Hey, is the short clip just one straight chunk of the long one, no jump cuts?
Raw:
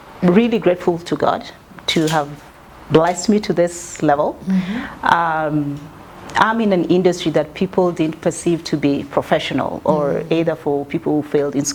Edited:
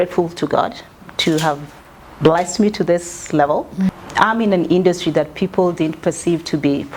no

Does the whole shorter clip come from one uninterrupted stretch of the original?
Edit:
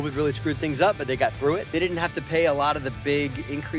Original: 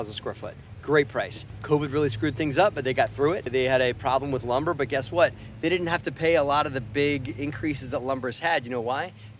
no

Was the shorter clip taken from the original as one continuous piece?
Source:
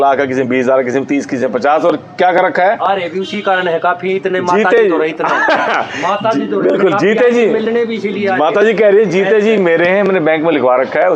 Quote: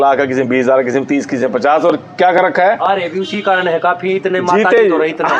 yes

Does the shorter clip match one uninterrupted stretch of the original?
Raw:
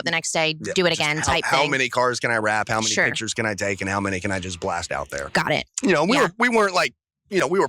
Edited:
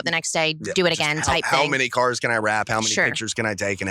yes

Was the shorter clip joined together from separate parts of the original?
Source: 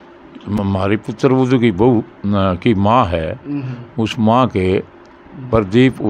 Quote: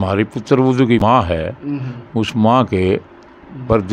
yes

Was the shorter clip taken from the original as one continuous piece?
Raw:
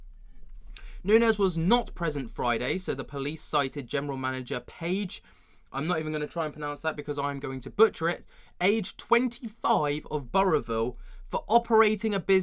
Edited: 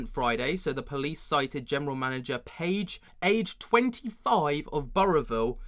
no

